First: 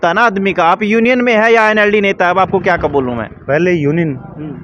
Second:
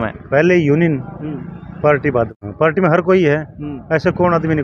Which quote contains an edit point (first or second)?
second